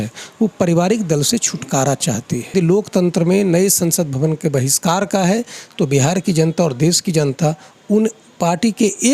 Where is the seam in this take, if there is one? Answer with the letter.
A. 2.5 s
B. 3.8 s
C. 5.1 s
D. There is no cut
A